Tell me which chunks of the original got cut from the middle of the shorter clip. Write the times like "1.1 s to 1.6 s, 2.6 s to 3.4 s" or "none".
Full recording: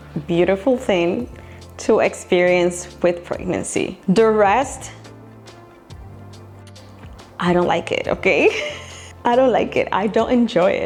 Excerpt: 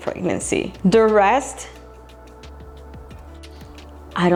none

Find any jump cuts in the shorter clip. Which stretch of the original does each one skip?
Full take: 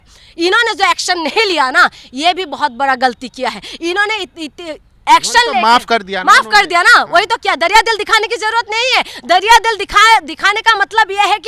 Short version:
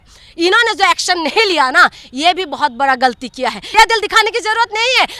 3.7 s to 7.7 s

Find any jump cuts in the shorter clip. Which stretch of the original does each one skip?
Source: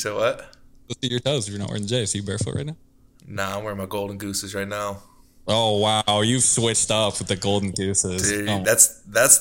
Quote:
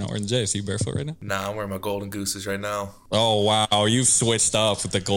2.8 s to 3.2 s, 5.0 s to 5.3 s

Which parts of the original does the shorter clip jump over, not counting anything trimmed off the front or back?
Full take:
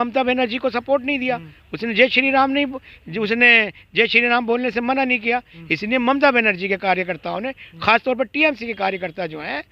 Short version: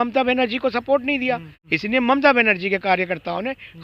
1.6 s to 5.6 s

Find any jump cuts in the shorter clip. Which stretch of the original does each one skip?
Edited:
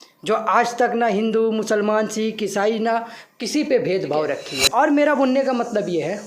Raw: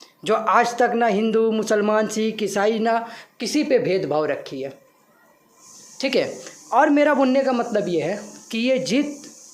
4.6 s to 6.5 s

